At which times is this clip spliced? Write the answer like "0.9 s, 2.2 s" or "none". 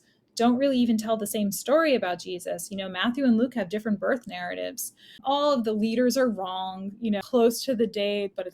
5.2 s, 7.2 s